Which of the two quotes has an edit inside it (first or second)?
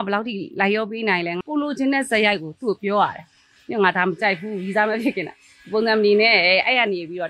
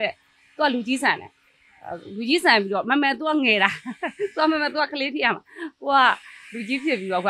first